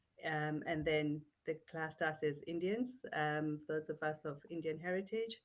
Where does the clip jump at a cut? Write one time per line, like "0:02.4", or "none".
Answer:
none